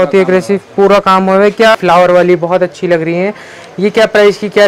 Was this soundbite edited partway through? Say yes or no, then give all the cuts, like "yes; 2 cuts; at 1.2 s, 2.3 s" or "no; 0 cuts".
yes; 1 cut; at 1.7 s